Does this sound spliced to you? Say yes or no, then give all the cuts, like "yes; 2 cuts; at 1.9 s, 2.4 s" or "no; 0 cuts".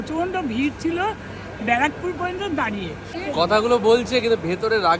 yes; 1 cut; at 3.1 s